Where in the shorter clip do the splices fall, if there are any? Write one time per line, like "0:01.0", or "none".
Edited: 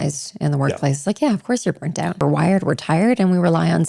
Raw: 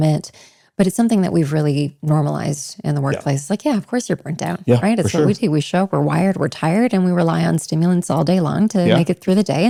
0:02.2

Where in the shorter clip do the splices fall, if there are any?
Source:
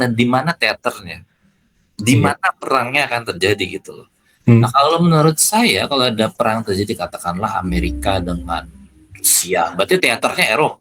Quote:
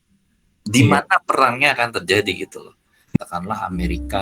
0:03.2

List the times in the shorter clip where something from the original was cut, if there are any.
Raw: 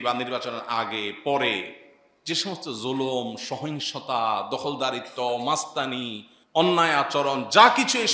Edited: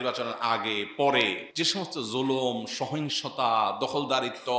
0:01.4

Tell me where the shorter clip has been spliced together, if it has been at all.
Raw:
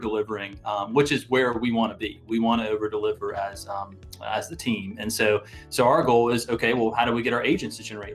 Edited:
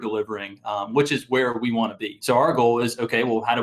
0:02.1

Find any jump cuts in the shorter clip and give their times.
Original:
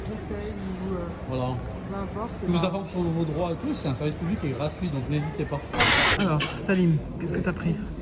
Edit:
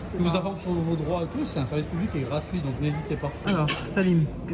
0:03.4

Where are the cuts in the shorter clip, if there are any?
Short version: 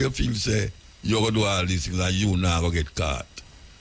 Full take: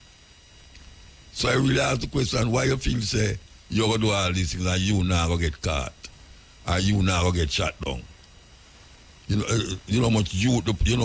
none

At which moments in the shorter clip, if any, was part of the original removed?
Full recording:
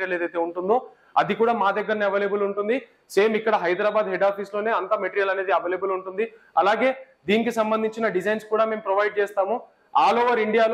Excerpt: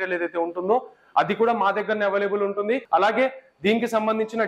0:02.8

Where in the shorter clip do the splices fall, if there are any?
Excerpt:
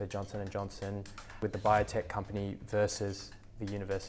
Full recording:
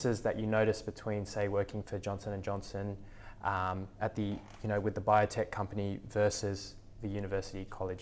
0:01.4

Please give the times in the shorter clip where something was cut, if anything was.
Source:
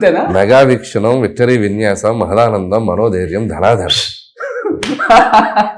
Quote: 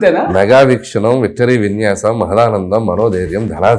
none

